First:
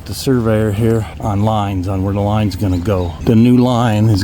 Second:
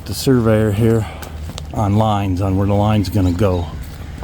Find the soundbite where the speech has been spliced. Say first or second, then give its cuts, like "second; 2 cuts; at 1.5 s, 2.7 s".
first; 2 cuts; at 1.1 s, 3.1 s